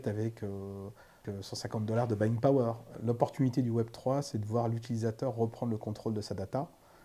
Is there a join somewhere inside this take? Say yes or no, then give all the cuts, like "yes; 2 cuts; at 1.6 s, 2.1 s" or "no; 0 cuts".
yes; 2 cuts; at 1.2 s, 3.0 s